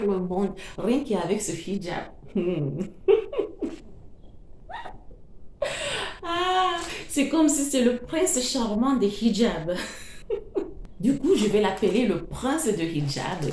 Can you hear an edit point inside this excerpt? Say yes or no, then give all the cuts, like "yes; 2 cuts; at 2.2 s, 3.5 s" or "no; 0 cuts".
yes; 1 cut; at 10.8 s